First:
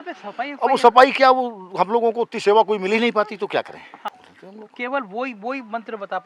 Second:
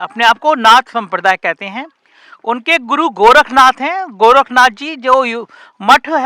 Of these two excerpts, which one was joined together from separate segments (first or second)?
first